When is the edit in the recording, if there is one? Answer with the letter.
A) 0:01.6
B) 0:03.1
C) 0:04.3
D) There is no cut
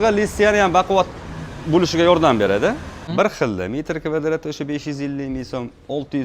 B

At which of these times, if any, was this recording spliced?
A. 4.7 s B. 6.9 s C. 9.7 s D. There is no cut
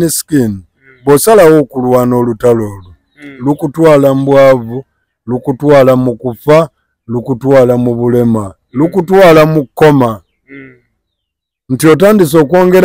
D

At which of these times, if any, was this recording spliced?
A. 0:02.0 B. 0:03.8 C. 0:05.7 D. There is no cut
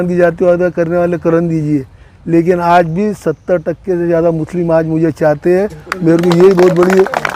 D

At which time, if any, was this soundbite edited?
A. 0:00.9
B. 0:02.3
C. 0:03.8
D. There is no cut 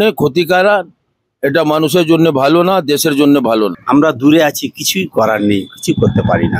C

